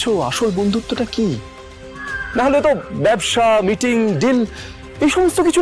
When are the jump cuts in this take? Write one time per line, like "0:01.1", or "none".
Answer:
none